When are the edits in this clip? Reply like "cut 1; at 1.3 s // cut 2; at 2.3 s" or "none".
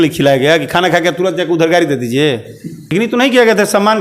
cut 1; at 2.8 s